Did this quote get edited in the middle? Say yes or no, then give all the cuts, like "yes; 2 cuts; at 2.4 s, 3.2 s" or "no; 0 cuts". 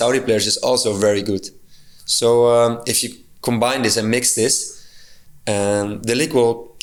no; 0 cuts